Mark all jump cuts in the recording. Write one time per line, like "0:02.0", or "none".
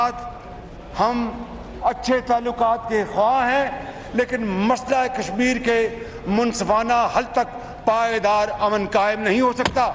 none